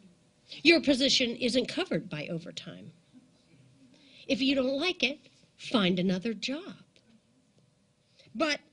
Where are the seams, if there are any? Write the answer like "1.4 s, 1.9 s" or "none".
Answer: none

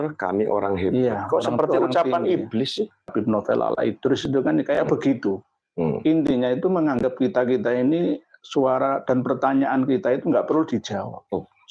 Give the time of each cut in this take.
3.1 s

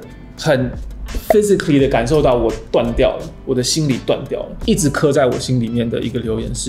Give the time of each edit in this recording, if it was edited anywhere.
4.5 s

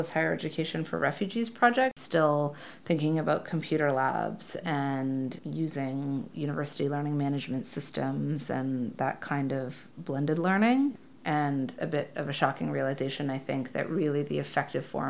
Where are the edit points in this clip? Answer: 2.0 s, 11.0 s

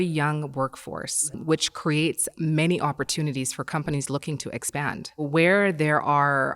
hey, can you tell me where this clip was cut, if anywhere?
1.4 s, 5.3 s

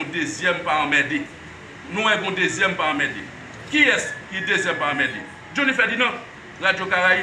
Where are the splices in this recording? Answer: none

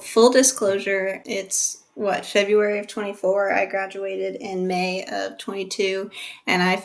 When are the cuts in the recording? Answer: 1.2 s

